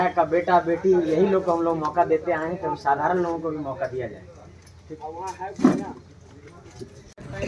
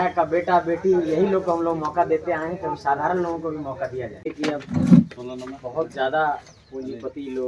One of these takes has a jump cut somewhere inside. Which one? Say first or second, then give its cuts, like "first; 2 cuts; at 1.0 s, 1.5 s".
second; 1 cut; at 4.3 s